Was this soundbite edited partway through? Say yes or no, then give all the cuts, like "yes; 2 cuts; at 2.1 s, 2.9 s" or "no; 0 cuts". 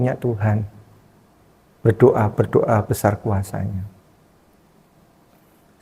no; 0 cuts